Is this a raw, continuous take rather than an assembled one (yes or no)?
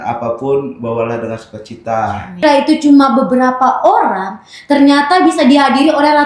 no